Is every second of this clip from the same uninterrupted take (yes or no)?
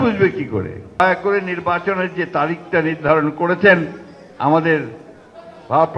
no